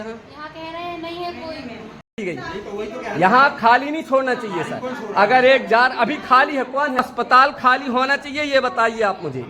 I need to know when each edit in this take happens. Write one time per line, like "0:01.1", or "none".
0:02.2
0:07.0